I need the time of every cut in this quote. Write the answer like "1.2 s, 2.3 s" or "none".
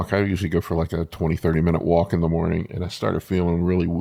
none